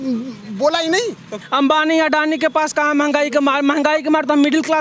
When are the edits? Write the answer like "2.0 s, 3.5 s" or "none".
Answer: 1.4 s